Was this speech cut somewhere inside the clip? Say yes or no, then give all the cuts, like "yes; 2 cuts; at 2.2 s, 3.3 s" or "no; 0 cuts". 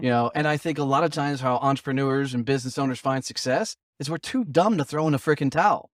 no; 0 cuts